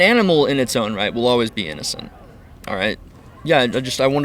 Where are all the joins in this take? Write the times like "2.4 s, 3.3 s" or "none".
3.1 s